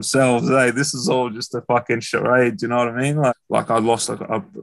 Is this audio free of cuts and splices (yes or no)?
no